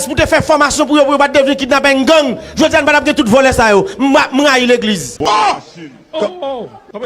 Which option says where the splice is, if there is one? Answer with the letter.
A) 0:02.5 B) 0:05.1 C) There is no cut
B